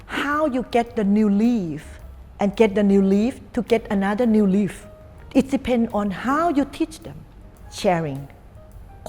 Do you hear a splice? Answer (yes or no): no